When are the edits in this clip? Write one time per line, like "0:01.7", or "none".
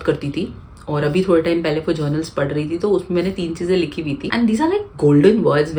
none